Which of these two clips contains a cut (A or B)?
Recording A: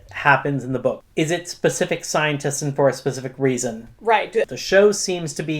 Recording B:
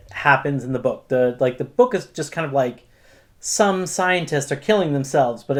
A